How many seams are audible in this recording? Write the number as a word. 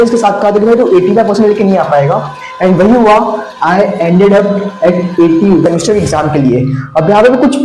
one